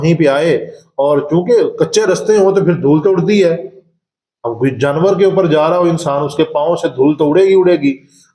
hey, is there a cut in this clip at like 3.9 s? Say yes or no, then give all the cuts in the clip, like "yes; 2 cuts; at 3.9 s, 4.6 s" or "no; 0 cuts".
no; 0 cuts